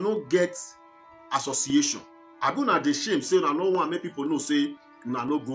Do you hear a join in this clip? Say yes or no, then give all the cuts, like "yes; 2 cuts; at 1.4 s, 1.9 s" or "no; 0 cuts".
no; 0 cuts